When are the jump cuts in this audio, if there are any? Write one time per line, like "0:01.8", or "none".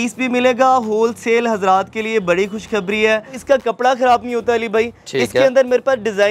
0:03.3